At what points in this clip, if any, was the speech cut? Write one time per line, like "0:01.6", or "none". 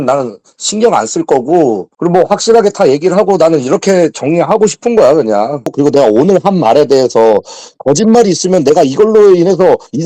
0:05.7